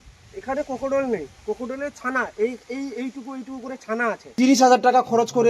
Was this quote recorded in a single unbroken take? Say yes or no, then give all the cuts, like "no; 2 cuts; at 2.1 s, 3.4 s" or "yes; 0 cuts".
no; 1 cut; at 4.2 s